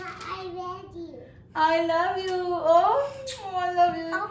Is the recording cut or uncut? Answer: uncut